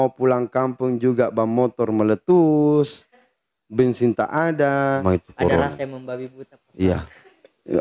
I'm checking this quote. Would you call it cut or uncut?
cut